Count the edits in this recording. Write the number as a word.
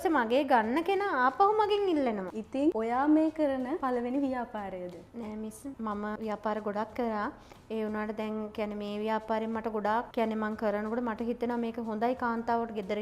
two